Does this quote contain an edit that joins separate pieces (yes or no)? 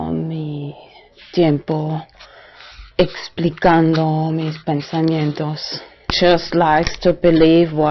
yes